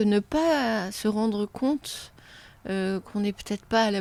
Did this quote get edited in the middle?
no; 0 cuts

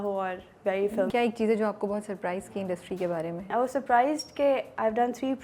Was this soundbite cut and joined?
yes; 2 cuts; at 1.1 s, 3.5 s

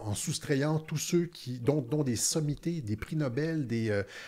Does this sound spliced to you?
no; 0 cuts

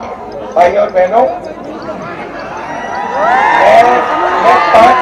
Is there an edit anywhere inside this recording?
no; 0 cuts

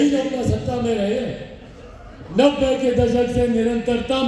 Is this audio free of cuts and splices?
yes; 0 cuts

